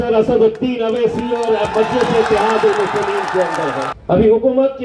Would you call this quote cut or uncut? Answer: cut